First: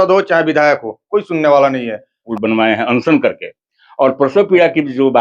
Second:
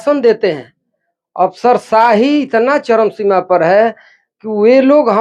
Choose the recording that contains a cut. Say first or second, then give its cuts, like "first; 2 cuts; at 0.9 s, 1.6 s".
first; 1 cut; at 2.3 s